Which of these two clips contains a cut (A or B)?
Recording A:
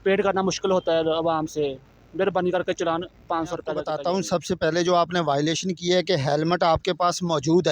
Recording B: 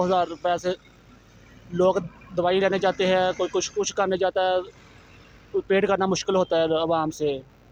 A